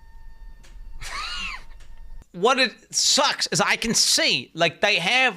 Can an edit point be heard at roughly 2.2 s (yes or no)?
yes